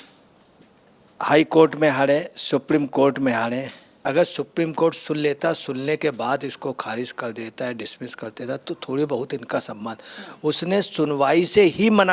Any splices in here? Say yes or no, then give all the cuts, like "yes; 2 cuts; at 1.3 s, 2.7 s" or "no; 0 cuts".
yes; 1 cut; at 4.0 s